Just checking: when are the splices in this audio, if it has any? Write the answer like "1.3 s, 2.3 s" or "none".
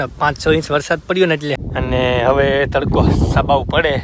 1.5 s